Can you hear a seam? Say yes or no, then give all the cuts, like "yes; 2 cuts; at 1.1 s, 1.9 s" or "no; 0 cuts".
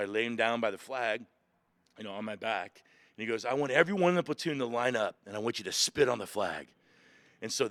no; 0 cuts